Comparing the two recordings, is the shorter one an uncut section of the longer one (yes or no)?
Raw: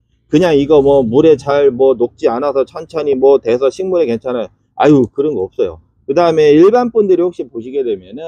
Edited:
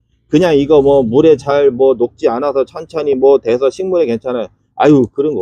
yes